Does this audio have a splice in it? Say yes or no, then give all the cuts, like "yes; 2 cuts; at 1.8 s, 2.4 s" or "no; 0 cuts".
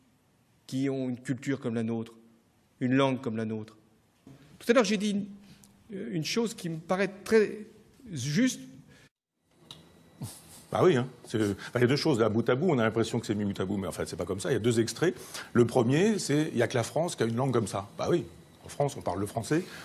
no; 0 cuts